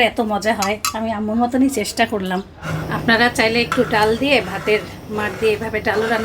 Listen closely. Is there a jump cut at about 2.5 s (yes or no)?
yes